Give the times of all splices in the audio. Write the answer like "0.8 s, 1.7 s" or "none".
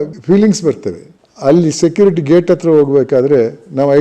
1.1 s